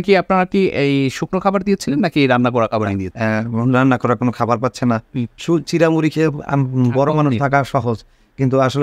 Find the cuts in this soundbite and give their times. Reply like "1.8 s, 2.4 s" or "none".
3.0 s